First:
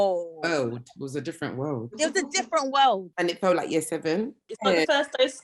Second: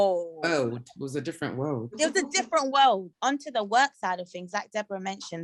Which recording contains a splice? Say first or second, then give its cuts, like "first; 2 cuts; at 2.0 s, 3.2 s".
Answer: first; 1 cut; at 3.1 s